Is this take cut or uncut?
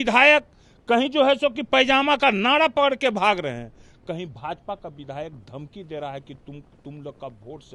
uncut